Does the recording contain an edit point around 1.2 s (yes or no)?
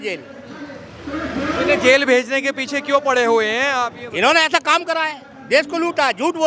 no